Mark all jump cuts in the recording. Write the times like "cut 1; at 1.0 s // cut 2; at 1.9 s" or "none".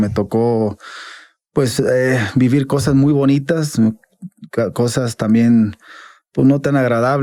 none